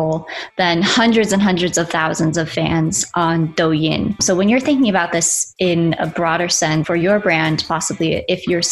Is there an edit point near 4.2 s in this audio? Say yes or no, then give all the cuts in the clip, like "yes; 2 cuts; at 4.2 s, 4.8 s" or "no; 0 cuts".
yes; 2 cuts; at 4.2 s, 6.8 s